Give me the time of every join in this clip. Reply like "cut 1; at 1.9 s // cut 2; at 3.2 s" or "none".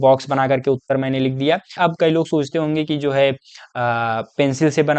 cut 1; at 1.7 s